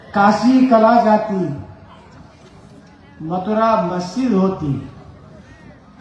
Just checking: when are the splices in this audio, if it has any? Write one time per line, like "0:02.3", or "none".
none